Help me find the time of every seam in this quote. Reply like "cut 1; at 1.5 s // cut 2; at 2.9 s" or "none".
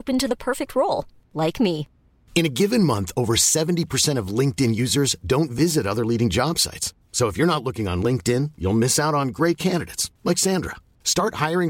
none